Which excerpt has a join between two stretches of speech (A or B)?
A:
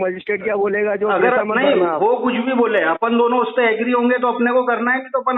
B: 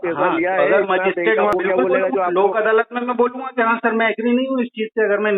B